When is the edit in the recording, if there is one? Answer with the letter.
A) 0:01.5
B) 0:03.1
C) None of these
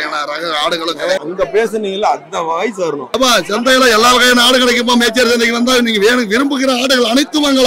B